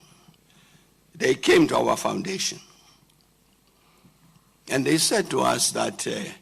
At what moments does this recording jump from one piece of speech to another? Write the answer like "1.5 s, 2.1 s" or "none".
none